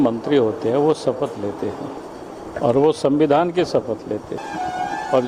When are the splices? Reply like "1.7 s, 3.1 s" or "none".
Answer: 2.0 s, 4.4 s